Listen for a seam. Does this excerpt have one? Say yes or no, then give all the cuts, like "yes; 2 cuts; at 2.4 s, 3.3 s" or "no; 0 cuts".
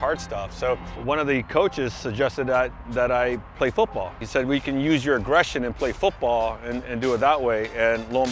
yes; 2 cuts; at 0.9 s, 4.2 s